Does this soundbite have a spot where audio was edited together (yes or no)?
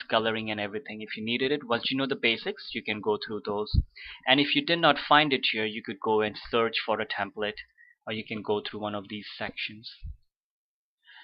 no